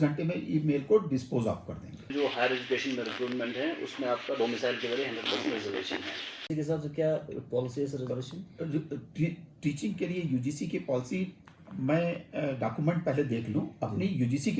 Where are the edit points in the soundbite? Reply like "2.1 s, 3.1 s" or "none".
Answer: 2.1 s, 6.5 s